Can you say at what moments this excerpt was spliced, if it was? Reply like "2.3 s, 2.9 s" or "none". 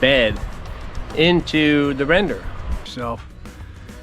2.9 s